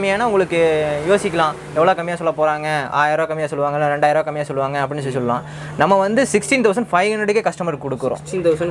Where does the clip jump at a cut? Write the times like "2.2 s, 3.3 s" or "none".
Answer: none